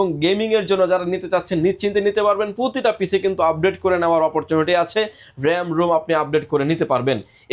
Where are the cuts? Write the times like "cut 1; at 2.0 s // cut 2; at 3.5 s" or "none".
none